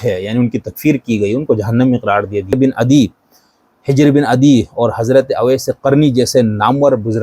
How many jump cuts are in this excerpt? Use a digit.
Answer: 1